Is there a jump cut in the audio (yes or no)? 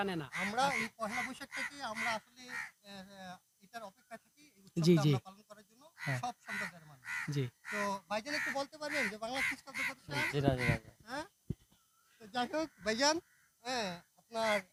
no